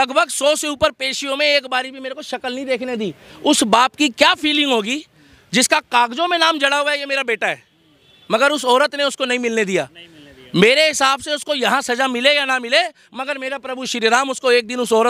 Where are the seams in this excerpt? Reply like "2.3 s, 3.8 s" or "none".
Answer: none